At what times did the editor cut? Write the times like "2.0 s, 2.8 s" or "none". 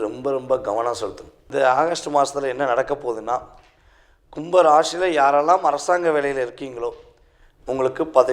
1.4 s